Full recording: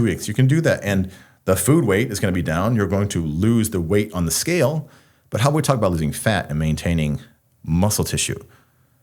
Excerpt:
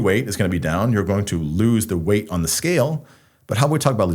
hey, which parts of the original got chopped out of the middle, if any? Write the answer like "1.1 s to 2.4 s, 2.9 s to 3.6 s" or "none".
none